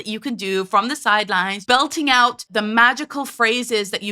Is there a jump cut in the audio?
yes; 2 cuts; at 1.6 s, 2.4 s

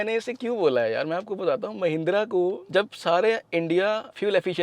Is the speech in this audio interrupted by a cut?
yes; 1 cut; at 2.6 s

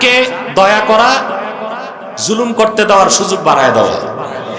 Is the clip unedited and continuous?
yes; 0 cuts

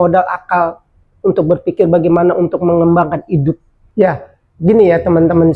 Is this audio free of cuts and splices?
no; 1 cut; at 3.7 s

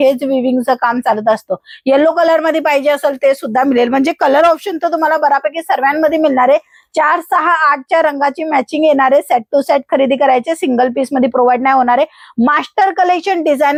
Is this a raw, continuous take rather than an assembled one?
yes; 0 cuts

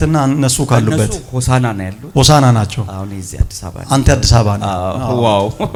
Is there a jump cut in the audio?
no; 0 cuts

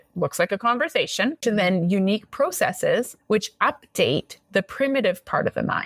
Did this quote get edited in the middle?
yes; 1 cut; at 1.4 s

